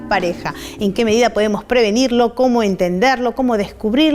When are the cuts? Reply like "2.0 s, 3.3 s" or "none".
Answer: 2.3 s